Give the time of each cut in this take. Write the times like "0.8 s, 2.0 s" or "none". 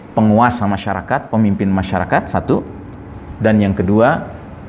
none

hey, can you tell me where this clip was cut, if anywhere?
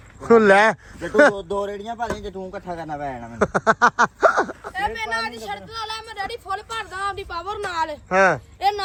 none

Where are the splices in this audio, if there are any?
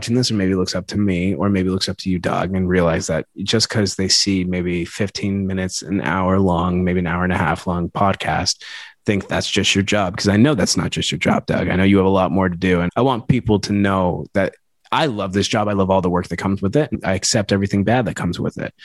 12.9 s

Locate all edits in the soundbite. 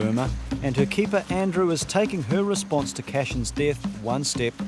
none

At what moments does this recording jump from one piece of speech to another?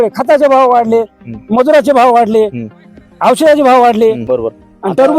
4.2 s

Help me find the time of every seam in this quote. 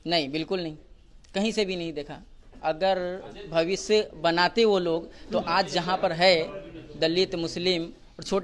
none

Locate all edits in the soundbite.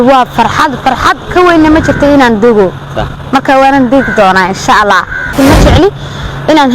5.3 s

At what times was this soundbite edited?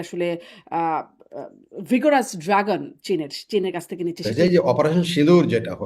4.3 s

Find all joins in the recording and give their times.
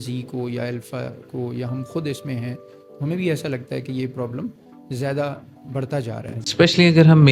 6.4 s

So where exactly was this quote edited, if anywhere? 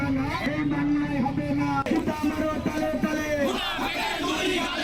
none

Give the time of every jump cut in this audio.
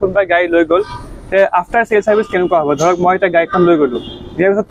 none

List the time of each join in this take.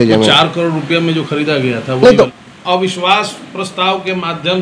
2.3 s

